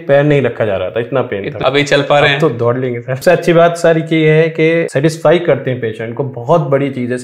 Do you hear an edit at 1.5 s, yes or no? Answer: yes